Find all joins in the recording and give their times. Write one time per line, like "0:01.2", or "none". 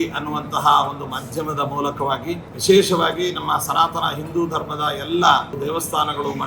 0:02.5
0:05.6